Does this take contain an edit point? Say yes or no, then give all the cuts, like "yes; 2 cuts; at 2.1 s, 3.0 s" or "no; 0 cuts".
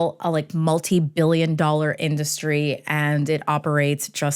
no; 0 cuts